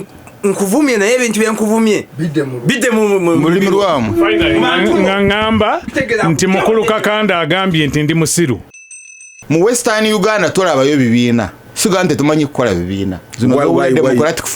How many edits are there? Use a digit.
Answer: 3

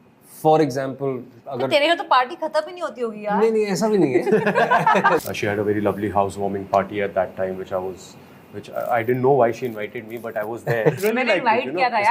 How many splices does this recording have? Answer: 2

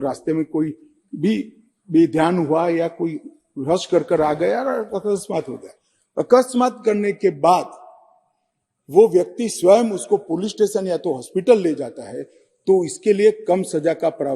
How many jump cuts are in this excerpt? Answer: 0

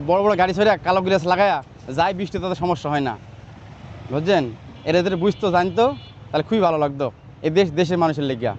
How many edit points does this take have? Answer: 0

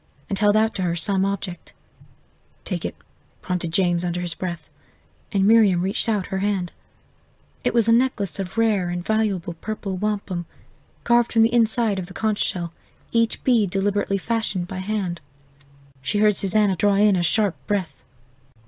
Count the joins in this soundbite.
0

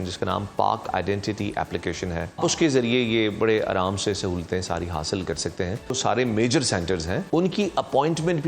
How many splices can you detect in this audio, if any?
3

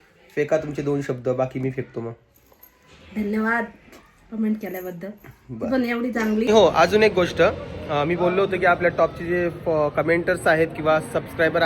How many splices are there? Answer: 1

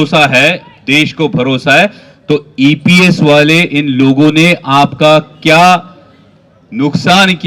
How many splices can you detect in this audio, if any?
0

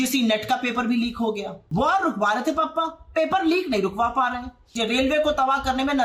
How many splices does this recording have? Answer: 2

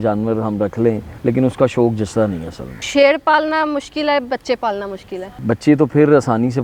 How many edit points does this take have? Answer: 3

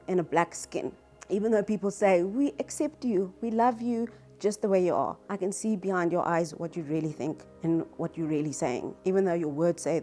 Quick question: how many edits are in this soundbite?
0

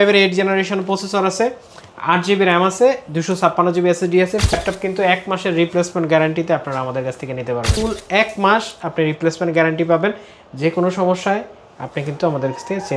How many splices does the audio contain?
2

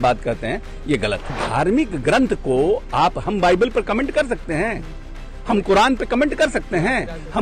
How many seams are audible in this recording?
1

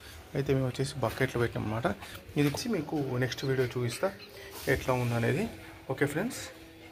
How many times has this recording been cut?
1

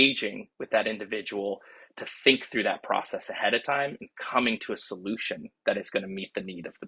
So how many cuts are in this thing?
0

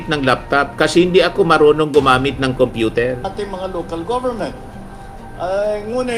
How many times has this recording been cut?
1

